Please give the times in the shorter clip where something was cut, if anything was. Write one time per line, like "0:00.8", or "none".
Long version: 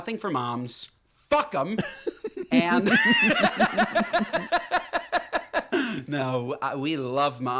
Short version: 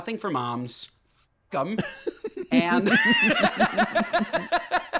none